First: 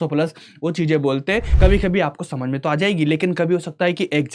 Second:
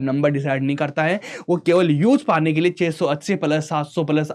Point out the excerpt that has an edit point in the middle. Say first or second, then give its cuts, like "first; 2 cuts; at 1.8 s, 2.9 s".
first; 1 cut; at 1.5 s